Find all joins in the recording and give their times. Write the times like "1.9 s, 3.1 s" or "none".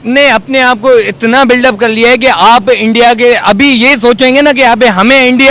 none